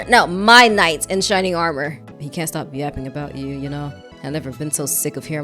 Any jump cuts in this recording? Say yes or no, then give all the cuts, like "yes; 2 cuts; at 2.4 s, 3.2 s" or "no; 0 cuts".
yes; 2 cuts; at 2.1 s, 4.1 s